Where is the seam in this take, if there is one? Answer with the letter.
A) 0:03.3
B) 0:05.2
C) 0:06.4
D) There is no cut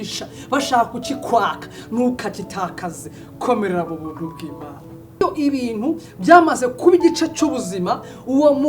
B